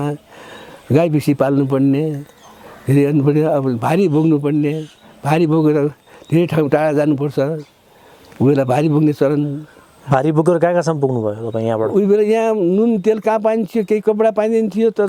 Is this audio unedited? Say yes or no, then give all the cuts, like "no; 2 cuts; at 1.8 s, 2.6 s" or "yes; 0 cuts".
yes; 0 cuts